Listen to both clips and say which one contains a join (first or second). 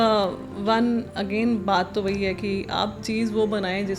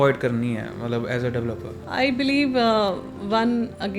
second